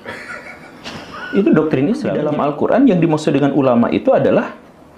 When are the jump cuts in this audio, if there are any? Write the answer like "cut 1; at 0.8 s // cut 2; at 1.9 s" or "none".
cut 1; at 2.2 s